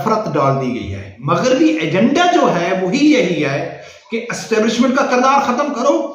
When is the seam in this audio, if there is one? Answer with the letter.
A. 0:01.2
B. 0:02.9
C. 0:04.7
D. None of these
A